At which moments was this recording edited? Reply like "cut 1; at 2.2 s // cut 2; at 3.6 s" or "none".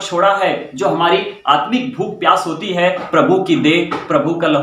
cut 1; at 3.0 s

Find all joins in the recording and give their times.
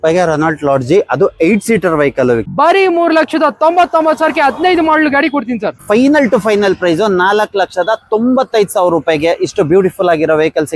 cut 1; at 2.5 s // cut 2; at 5.8 s

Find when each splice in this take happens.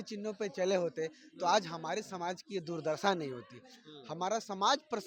none

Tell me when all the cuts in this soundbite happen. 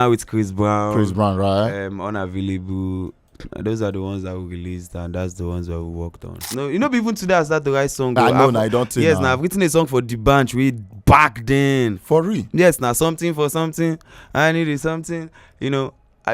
cut 1; at 6.4 s

